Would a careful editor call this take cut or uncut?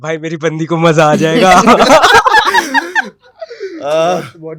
uncut